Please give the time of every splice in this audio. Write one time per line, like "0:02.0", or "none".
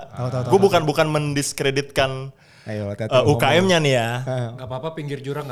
none